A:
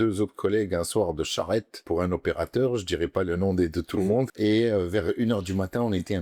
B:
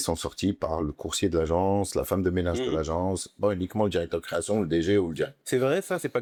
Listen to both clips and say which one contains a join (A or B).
A